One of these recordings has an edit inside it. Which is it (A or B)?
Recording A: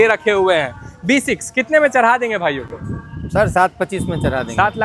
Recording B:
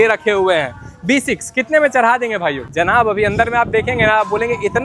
B